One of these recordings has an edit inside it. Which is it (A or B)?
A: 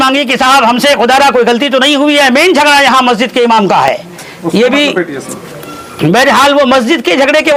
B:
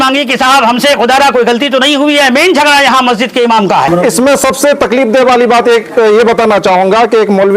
B